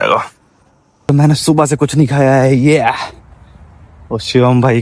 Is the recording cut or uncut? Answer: cut